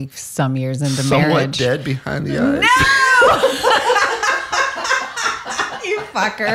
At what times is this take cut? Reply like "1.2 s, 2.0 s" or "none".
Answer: none